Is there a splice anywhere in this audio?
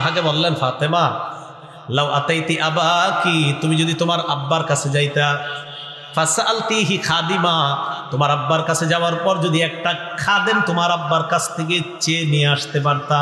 no; 0 cuts

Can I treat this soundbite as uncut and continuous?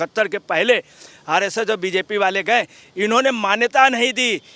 yes; 0 cuts

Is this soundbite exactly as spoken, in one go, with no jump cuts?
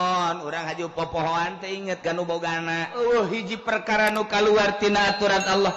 no; 1 cut; at 2.9 s

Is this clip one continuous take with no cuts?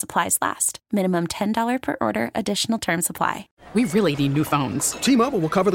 no; 1 cut; at 3.5 s

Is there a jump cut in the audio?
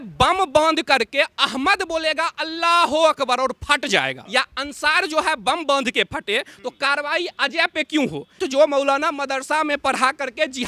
yes; 2 cuts; at 4.2 s, 8.4 s

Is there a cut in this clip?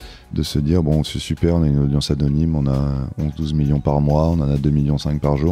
no; 0 cuts

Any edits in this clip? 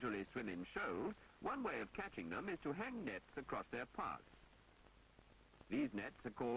yes; 1 cut; at 4.4 s

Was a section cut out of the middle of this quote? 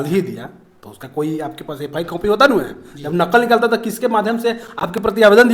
no; 0 cuts

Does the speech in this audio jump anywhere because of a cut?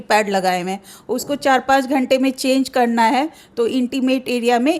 no; 0 cuts

